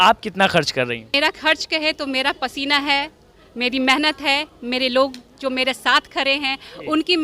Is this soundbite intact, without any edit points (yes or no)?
no